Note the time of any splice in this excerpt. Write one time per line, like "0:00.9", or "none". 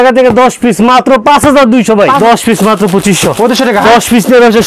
0:02.2